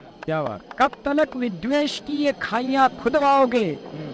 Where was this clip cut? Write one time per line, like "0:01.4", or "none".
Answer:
none

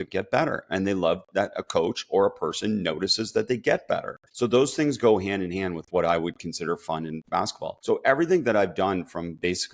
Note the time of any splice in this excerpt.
0:04.2
0:07.7

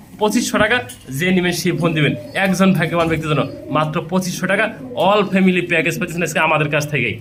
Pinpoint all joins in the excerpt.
none

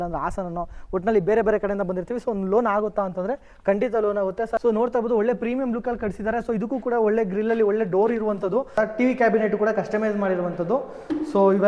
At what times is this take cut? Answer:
0:04.6
0:08.7

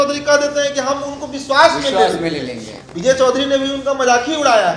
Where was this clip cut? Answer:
none

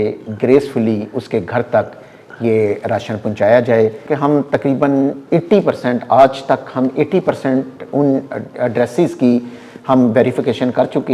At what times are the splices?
0:04.1

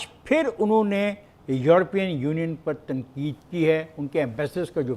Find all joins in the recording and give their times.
none

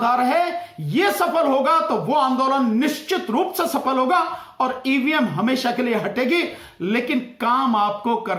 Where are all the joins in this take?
none

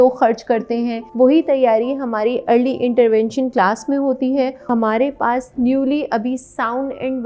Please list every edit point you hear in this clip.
0:01.0
0:04.6

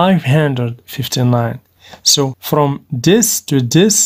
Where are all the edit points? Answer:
0:02.4

